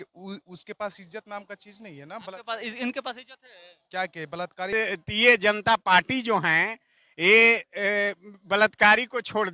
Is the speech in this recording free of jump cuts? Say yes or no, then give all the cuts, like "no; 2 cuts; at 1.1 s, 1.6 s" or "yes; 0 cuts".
no; 1 cut; at 4.7 s